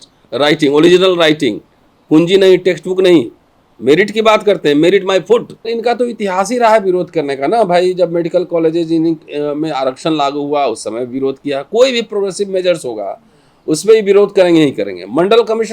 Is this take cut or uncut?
cut